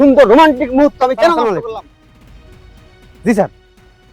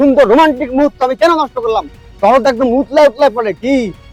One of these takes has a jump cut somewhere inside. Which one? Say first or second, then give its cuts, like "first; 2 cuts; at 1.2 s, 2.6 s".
first; 1 cut; at 1.6 s